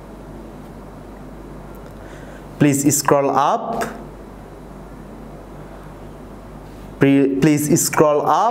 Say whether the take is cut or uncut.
uncut